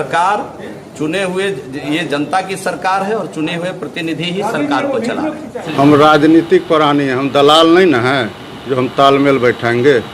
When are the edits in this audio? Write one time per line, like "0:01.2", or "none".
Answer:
0:05.7